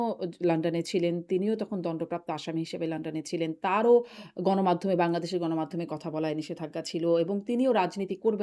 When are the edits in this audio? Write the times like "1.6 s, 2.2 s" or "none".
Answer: none